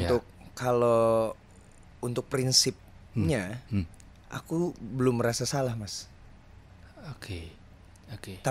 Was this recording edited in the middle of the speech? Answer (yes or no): no